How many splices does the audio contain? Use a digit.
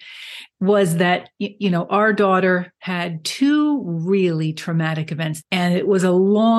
1